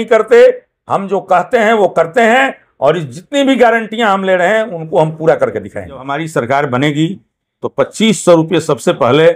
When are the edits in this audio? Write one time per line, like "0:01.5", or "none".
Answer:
0:06.1